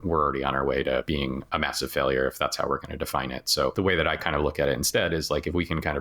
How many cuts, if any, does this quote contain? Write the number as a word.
two